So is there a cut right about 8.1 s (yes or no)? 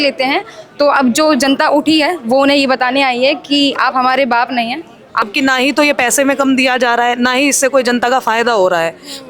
no